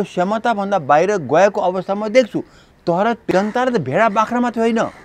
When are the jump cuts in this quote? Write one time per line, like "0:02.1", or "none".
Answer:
0:03.3